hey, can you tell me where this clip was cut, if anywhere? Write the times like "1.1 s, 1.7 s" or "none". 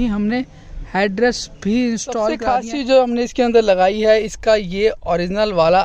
2.4 s